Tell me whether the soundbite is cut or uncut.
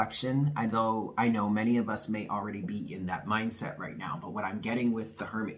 uncut